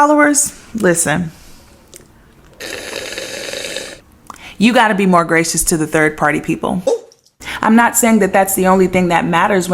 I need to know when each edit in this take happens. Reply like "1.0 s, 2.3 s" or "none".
7.1 s